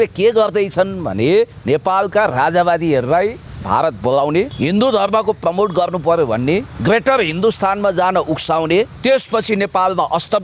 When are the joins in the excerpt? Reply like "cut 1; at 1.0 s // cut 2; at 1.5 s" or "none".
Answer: cut 1; at 1.6 s // cut 2; at 3.5 s // cut 3; at 4.5 s // cut 4; at 6.7 s // cut 5; at 8.9 s